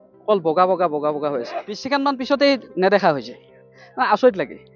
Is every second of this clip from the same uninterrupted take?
no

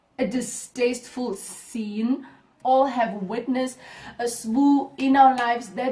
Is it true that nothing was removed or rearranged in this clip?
no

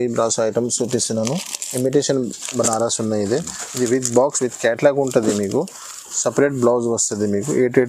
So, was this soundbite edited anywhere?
no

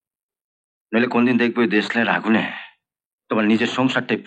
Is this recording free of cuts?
yes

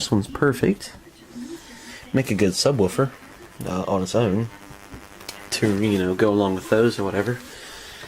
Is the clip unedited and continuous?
no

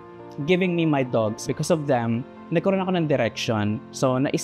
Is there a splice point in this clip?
yes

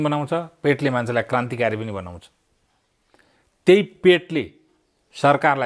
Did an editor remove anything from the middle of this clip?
no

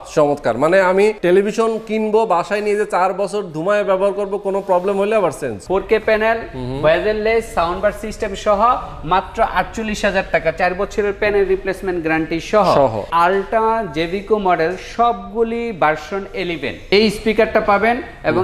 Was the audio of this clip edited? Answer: yes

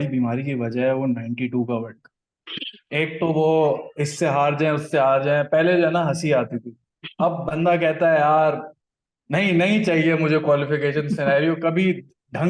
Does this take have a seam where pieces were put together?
no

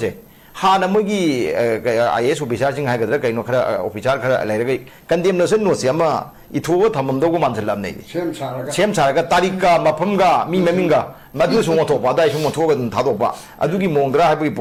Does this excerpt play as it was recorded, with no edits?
yes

